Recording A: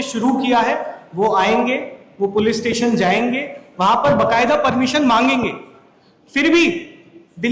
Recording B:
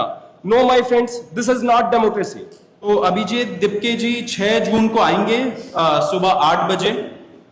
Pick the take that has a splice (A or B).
B